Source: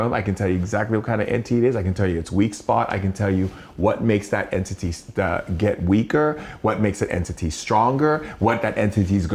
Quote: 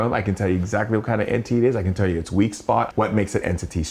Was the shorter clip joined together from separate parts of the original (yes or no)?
yes